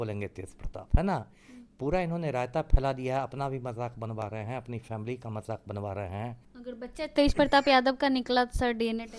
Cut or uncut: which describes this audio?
cut